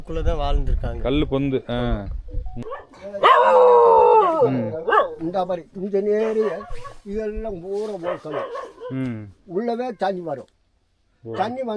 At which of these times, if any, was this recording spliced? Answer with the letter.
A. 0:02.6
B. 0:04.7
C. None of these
A